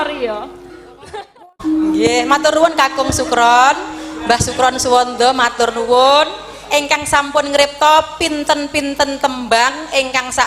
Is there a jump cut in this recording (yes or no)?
yes